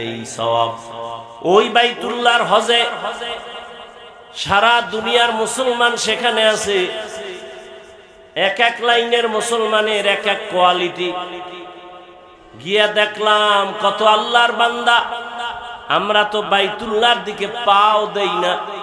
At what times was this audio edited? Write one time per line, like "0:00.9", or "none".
0:01.2